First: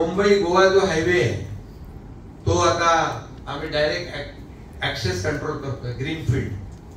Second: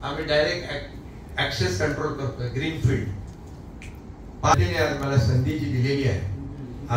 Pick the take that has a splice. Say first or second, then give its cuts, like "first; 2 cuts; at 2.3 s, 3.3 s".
second; 1 cut; at 4.5 s